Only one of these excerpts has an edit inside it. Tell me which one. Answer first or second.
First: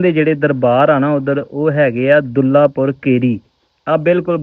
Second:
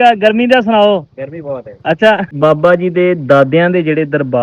second